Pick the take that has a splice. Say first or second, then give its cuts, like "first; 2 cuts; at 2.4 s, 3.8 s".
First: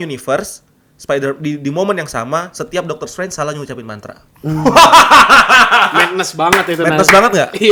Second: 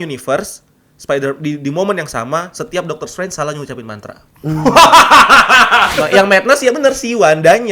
second; 1 cut; at 5.9 s